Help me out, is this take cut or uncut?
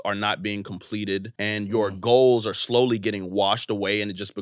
cut